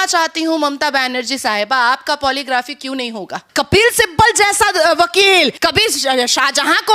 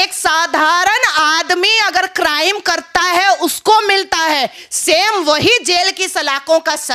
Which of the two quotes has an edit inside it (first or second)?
first